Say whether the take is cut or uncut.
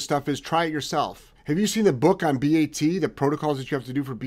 cut